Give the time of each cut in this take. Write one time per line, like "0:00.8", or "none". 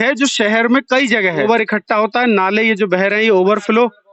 0:01.4